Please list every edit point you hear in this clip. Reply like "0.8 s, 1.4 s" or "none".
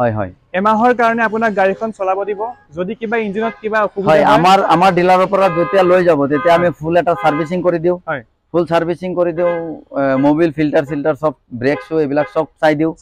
none